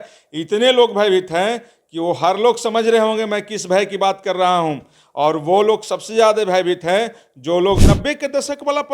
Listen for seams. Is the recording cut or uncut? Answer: cut